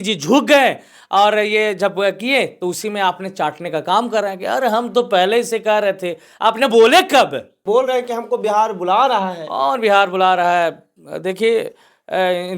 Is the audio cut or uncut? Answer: cut